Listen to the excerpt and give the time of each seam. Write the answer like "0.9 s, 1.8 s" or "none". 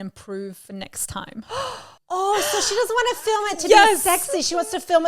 1.9 s